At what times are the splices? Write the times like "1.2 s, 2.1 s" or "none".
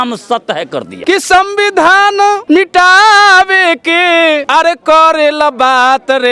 0.9 s, 2.4 s, 4.4 s

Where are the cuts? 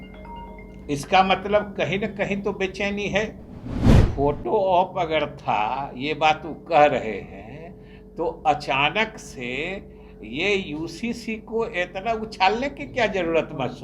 3.8 s

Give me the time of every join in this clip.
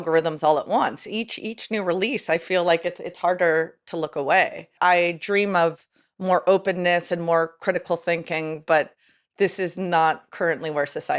4.7 s

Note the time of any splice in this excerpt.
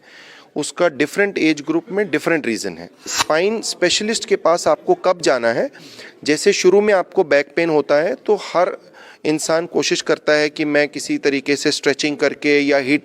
3.1 s

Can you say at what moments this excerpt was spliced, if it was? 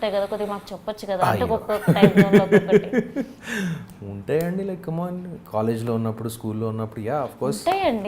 none

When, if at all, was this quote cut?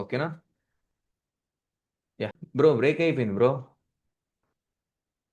2.4 s

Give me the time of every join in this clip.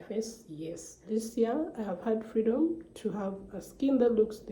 1.0 s

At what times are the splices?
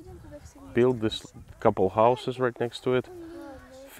none

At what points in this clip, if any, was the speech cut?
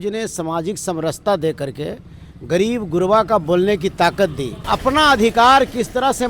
4.6 s

